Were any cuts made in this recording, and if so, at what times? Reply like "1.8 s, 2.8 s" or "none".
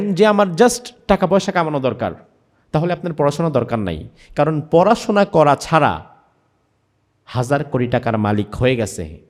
none